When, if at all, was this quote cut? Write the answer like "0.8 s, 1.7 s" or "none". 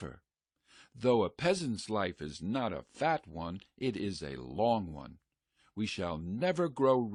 none